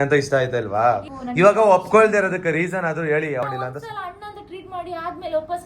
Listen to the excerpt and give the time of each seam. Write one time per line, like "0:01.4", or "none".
0:01.1
0:03.4